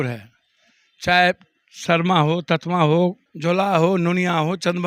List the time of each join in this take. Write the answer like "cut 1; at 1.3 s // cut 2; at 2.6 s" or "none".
cut 1; at 3.3 s

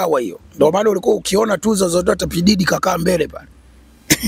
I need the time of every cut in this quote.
none

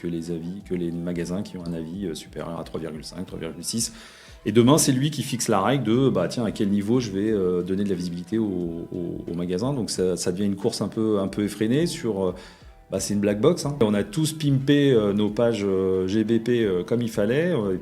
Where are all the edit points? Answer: cut 1; at 13.8 s

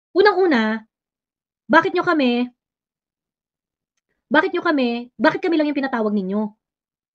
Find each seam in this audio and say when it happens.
none

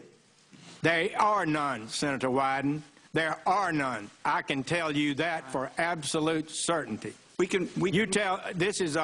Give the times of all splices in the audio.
none

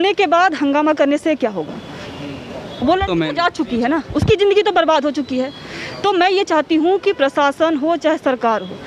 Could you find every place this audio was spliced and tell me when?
none

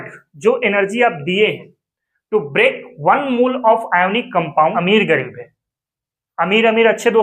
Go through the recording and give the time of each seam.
cut 1; at 4.7 s

